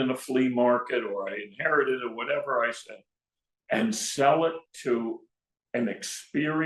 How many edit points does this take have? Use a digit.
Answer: 0